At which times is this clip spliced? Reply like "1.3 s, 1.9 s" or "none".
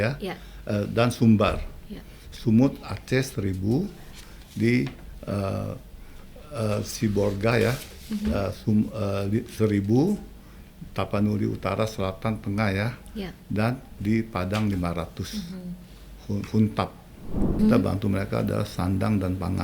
17.6 s